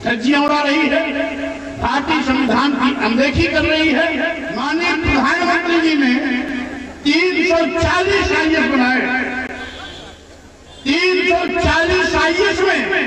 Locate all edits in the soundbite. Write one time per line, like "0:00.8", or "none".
0:04.5

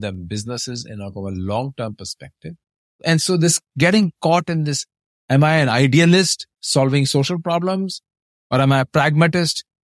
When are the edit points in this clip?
0:03.0

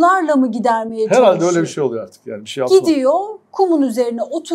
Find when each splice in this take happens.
none

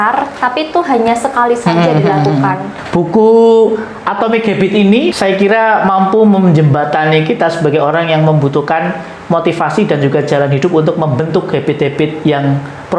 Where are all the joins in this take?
0:02.7
0:05.2

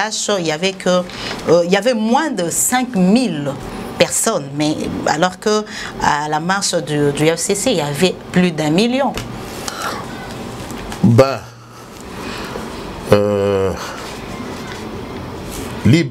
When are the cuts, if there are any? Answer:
none

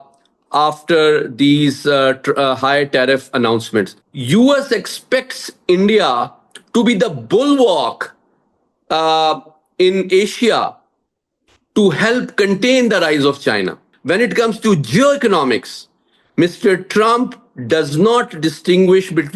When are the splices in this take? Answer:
0:03.9
0:13.9

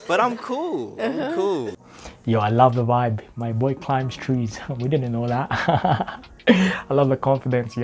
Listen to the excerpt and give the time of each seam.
none

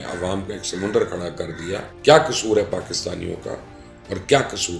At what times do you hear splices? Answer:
0:01.9

